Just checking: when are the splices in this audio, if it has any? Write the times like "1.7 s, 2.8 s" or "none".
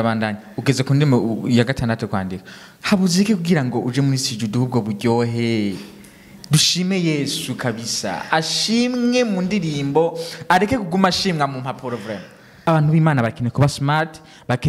12.7 s